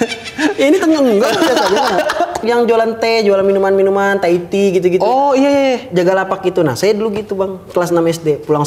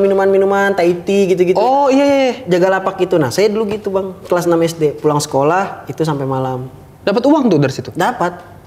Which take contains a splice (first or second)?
first